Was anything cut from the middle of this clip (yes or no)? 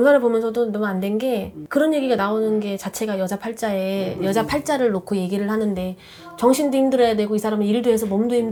no